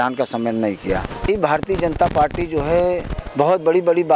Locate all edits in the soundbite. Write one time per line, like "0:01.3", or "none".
0:01.3